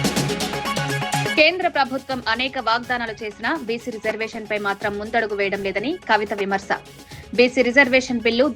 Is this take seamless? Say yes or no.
no